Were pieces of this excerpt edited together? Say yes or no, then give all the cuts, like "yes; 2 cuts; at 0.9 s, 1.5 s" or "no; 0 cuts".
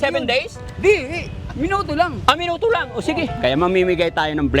yes; 1 cut; at 3.3 s